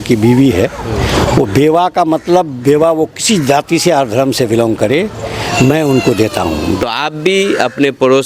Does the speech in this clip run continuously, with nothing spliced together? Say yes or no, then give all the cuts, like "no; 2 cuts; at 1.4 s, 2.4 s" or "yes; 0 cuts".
no; 1 cut; at 6.8 s